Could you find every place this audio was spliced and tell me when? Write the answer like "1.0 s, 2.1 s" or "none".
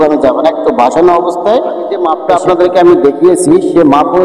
2.1 s